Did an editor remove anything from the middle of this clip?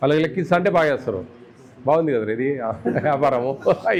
no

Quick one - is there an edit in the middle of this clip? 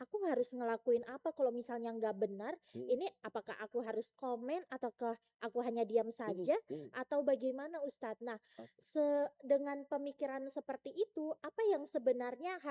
no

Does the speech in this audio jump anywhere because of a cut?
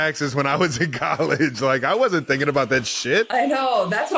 yes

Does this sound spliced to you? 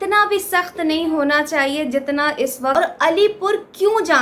yes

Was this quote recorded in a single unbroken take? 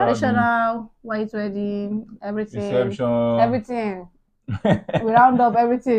yes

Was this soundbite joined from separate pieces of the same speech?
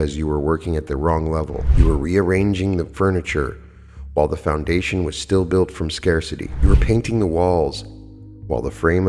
yes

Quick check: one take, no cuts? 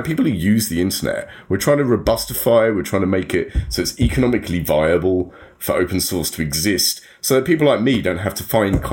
yes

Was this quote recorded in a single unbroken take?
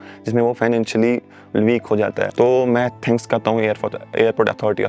no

